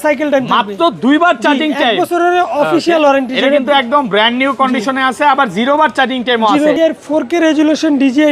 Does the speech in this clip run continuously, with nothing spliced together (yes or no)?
no